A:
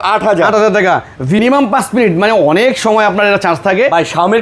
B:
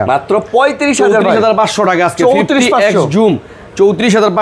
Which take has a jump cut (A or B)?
A